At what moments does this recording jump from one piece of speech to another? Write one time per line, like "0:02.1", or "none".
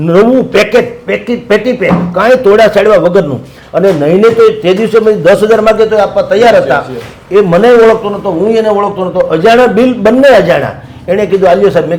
none